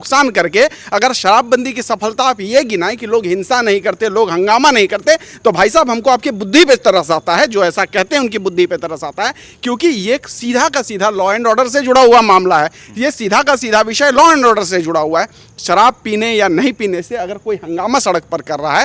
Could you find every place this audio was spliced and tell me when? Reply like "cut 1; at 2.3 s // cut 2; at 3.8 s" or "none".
none

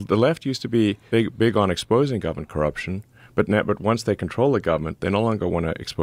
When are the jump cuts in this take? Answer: cut 1; at 1.0 s

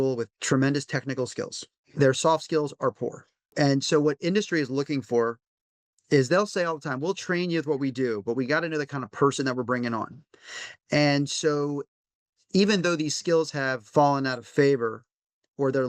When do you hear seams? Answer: cut 1; at 1.8 s // cut 2; at 3.5 s

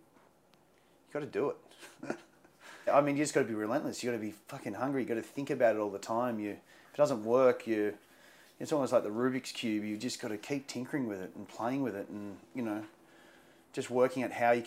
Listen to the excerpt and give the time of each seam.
cut 1; at 2.9 s

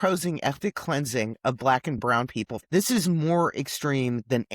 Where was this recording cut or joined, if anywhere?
cut 1; at 2.0 s

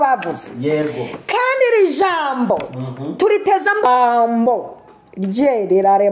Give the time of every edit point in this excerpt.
cut 1; at 3.9 s

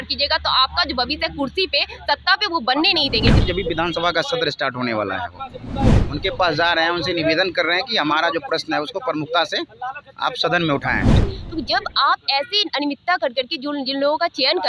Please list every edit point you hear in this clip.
cut 1; at 3.4 s // cut 2; at 6.0 s // cut 3; at 11.3 s

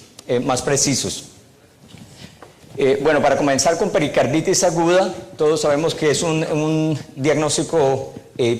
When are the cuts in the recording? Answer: cut 1; at 3.8 s

